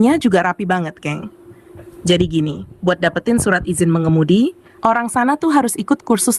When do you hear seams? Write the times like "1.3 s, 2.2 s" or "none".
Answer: none